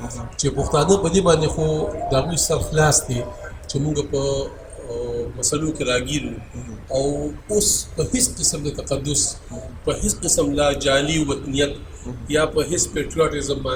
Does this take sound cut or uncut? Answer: uncut